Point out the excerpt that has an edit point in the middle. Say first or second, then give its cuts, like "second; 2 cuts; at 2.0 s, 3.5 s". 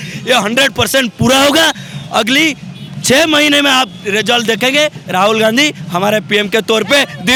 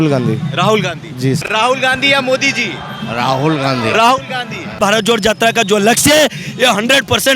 second; 2 cuts; at 1.4 s, 4.8 s